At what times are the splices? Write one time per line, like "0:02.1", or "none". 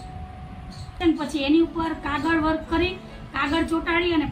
0:01.0